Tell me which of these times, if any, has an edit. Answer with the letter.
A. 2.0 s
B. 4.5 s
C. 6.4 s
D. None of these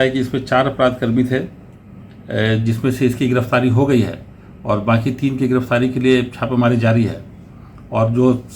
D